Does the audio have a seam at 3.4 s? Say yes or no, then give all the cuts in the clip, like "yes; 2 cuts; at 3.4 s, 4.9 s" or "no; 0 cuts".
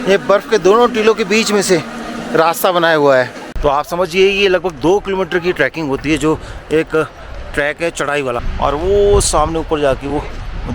yes; 2 cuts; at 3.4 s, 8.5 s